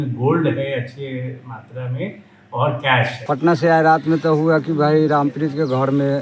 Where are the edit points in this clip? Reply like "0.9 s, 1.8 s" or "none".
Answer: 3.2 s